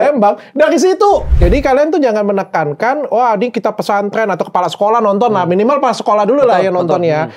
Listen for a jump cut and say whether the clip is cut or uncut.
cut